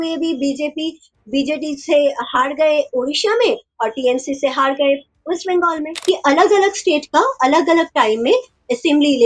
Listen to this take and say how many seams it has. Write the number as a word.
one